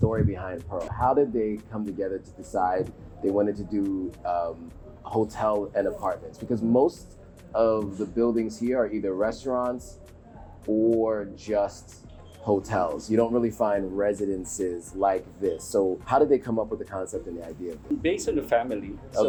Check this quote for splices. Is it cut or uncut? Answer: uncut